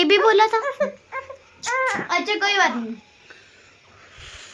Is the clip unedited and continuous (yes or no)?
yes